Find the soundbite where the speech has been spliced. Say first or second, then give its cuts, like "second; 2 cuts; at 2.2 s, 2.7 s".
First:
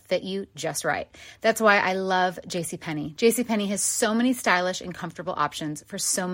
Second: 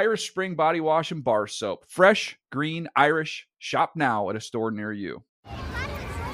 second; 1 cut; at 5.2 s